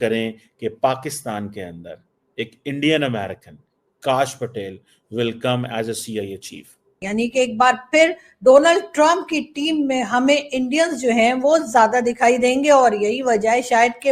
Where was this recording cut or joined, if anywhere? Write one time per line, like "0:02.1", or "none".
0:07.0